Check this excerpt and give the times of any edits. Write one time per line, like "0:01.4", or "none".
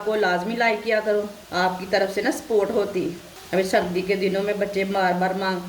0:01.4
0:03.3

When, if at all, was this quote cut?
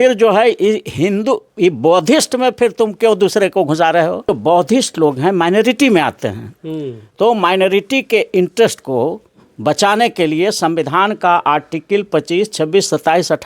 0:04.4

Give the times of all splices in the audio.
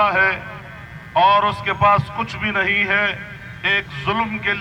none

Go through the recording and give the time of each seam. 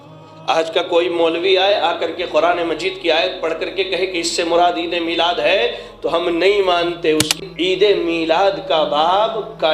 0:07.4

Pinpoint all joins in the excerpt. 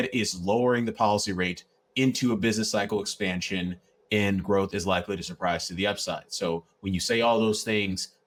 none

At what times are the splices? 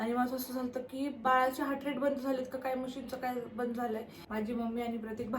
0:01.2
0:04.2

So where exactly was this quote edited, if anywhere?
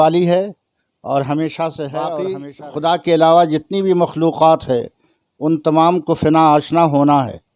0:02.4

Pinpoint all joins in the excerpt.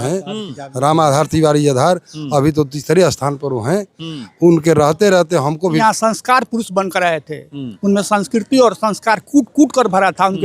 0:05.8

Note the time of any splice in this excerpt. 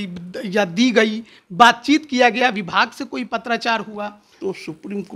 0:04.2

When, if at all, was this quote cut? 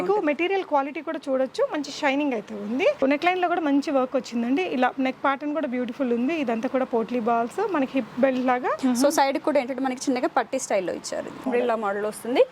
0:03.0
0:08.8
0:11.4

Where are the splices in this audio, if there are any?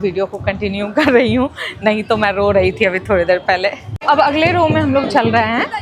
none

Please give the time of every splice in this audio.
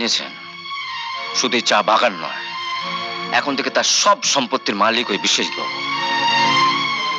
none

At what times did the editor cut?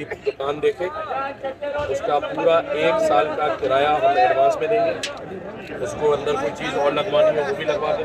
none

